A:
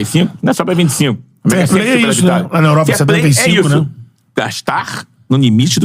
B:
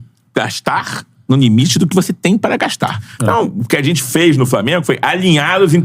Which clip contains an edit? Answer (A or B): B